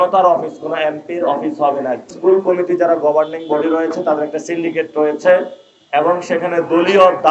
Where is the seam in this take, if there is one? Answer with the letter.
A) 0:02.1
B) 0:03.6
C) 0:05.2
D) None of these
A